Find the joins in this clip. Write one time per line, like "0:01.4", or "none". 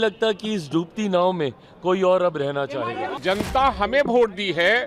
0:03.2